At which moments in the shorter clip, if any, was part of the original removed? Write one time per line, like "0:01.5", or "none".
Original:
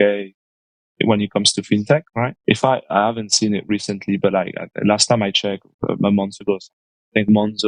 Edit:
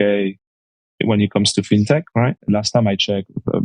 0:02.4